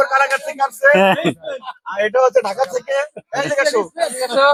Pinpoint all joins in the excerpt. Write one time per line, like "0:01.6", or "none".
none